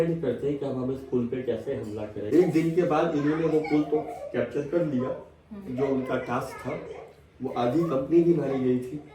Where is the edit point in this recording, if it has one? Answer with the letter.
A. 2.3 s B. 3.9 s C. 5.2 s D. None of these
A